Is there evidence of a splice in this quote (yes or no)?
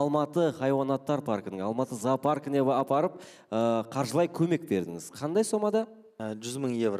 yes